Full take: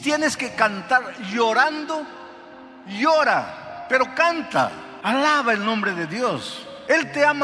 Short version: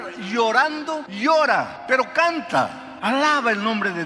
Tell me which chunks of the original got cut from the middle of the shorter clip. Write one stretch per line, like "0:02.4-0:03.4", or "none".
0:02.1-0:02.9
0:03.5-0:03.8